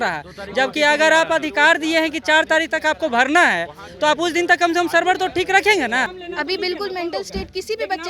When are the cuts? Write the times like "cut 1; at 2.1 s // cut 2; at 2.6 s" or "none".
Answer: cut 1; at 6.2 s